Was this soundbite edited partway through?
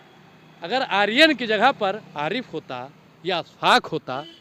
no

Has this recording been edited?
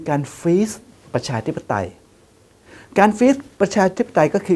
no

